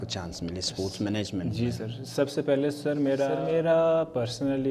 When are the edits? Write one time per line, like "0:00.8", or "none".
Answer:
0:03.4